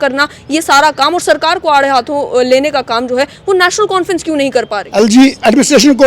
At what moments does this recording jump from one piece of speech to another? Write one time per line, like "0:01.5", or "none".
0:04.8